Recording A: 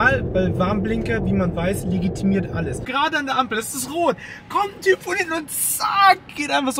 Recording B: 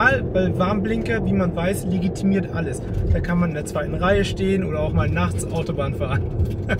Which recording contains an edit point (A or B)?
A